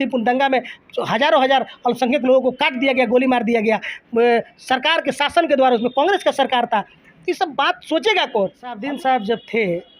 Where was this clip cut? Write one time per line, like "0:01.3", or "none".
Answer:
0:08.8